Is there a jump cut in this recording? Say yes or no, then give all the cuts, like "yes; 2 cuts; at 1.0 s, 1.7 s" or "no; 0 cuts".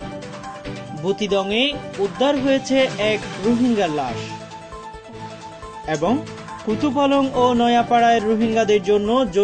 yes; 1 cut; at 1.0 s